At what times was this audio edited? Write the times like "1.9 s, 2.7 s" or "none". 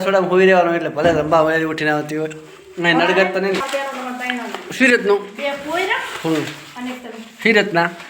3.6 s